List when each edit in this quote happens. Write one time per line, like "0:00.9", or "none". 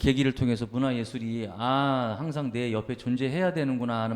none